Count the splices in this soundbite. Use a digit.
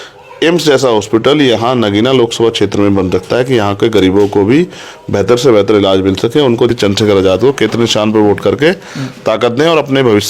1